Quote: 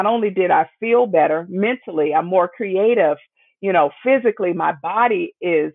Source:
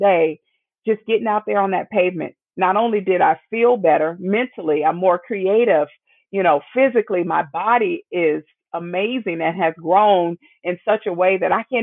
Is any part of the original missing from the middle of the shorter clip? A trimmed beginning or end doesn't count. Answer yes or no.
no